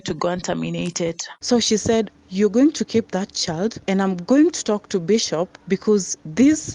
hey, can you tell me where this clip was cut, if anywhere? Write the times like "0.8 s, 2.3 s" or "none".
1.3 s, 3.8 s, 5.5 s

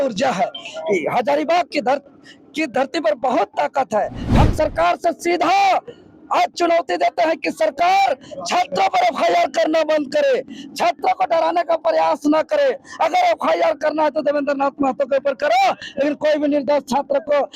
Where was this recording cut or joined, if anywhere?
4.2 s

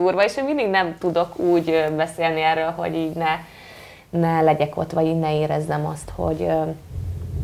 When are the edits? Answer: none

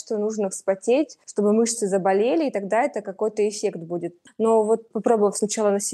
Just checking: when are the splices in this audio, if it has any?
1.2 s, 4.2 s, 4.9 s

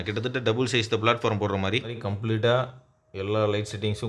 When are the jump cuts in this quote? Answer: 2.0 s

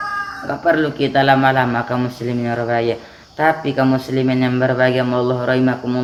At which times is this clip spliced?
none

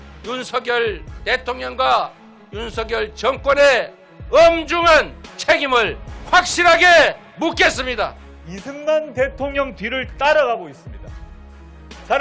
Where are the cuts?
8.2 s

